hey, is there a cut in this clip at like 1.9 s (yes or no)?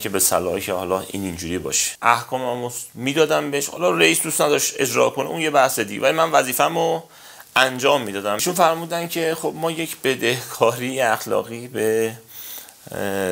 yes